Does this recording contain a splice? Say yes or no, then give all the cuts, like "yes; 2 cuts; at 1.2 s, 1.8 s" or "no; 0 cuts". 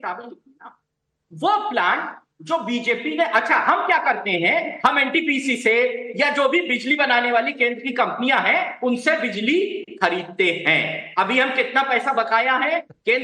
yes; 1 cut; at 10.6 s